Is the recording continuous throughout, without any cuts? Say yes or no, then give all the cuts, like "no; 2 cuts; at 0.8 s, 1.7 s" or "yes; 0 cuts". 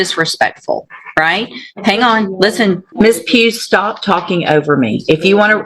no; 1 cut; at 2.9 s